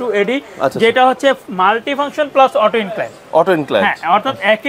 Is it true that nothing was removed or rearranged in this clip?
yes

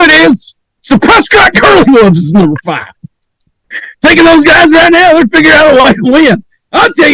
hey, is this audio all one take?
yes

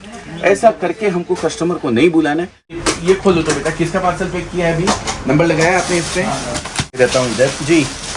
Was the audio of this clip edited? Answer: yes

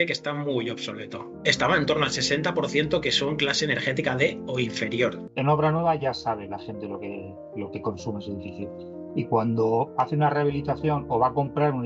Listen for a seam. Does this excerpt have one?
yes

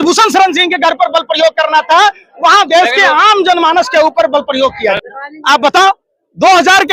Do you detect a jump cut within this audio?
yes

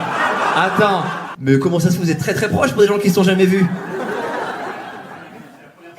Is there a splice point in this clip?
yes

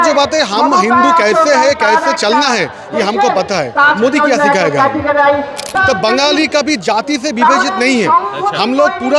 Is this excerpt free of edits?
no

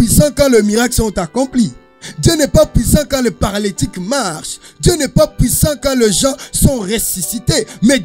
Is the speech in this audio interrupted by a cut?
no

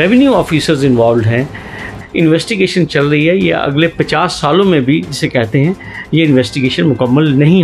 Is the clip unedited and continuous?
no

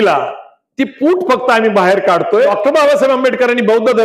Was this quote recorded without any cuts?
no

